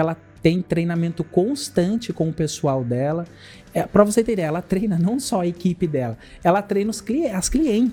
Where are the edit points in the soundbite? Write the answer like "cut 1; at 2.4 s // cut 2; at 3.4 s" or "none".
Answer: none